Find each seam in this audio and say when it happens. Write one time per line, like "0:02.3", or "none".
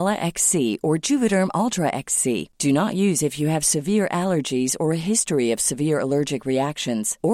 none